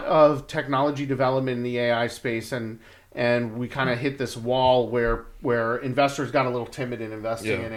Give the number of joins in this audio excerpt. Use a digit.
0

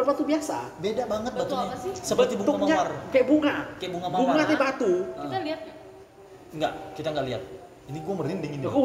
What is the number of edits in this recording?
0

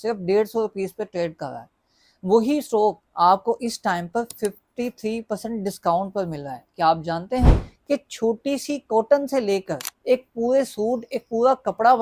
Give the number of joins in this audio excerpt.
1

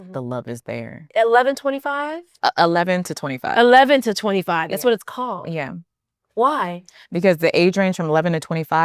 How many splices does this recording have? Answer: 0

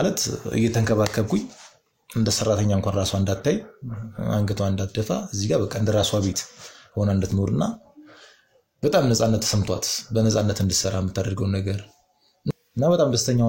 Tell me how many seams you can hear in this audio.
1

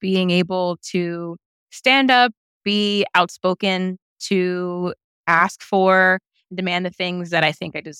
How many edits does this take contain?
1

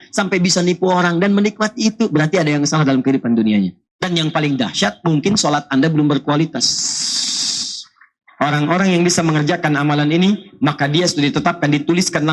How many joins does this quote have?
2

